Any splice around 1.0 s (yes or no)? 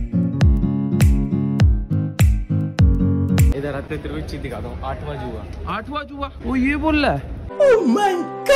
no